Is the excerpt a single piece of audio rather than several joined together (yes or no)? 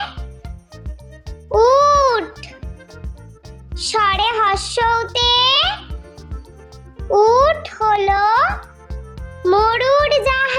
yes